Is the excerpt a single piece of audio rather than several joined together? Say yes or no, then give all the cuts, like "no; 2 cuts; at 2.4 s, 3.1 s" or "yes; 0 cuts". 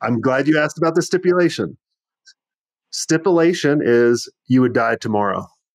yes; 0 cuts